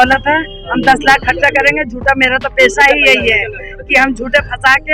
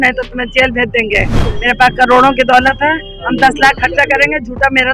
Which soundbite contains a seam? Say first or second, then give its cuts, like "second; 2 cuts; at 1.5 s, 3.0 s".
second; 1 cut; at 1.5 s